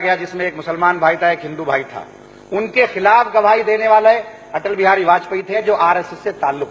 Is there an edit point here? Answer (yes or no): yes